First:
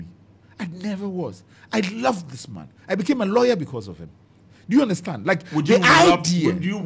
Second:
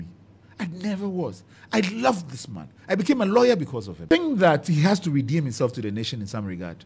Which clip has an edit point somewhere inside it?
second; 1 cut; at 4.0 s

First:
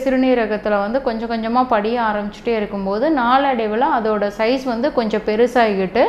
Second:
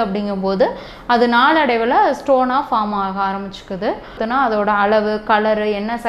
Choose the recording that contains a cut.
second; 1 cut; at 4.2 s

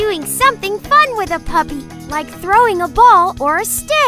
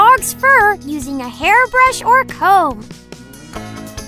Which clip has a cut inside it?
second; 1 cut; at 3.1 s

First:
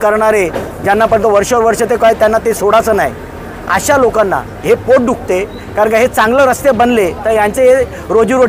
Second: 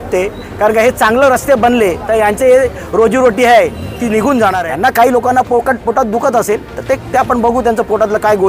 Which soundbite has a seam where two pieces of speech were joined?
second; 1 cut; at 4.6 s

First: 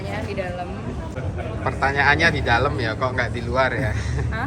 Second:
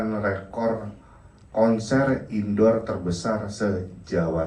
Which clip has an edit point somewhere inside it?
first; 1 cut; at 1.2 s

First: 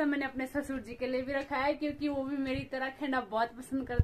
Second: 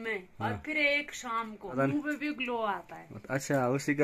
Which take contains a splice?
second; 1 cut; at 1.7 s

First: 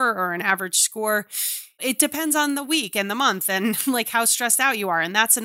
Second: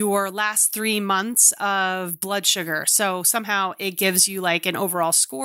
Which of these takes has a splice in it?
first; 1 cut; at 1.5 s

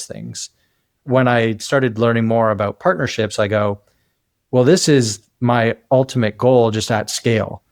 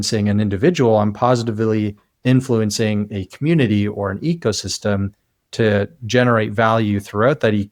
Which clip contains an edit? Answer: first; 1 cut; at 1.0 s

